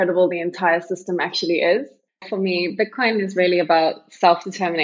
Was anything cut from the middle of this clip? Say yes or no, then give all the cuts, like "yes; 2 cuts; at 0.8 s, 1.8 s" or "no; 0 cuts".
yes; 1 cut; at 2.3 s